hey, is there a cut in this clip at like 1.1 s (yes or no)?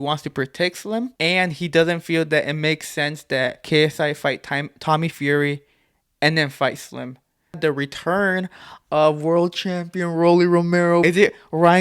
yes